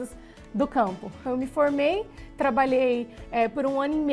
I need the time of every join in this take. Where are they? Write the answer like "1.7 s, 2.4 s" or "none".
1.2 s